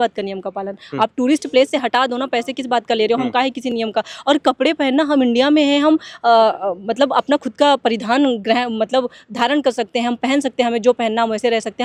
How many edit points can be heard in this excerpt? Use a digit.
0